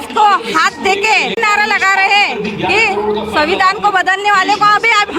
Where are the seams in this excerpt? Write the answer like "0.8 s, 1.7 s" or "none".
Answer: 1.4 s